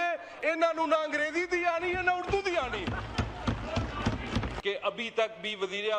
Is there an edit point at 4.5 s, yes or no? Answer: yes